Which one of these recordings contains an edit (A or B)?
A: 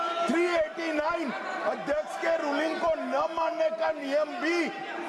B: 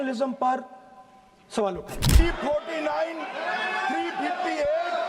B